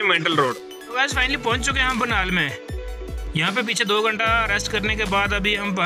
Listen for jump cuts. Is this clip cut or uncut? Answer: cut